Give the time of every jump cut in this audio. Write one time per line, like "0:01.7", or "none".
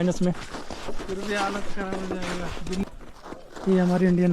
0:02.8